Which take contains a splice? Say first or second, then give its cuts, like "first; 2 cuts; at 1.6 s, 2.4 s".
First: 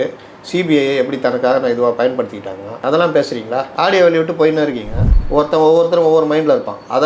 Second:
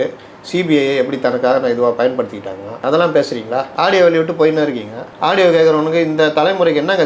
first; 1 cut; at 5.1 s